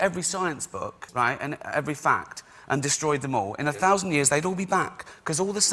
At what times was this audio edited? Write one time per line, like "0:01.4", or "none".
0:01.0